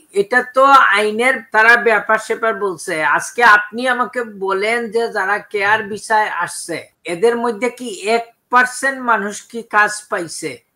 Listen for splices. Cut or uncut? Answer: cut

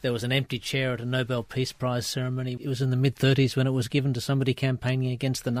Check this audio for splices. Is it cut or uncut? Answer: cut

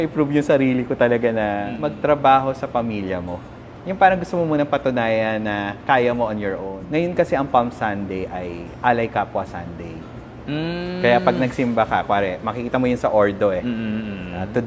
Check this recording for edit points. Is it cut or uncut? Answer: cut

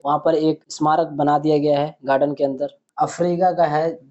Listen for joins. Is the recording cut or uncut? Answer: cut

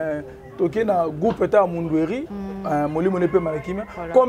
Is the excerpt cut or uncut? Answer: uncut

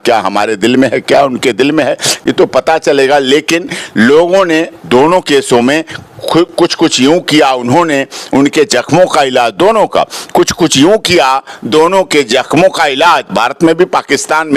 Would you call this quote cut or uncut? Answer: uncut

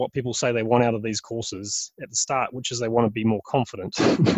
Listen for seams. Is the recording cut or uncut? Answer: uncut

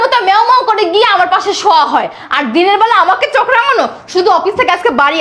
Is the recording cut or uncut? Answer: uncut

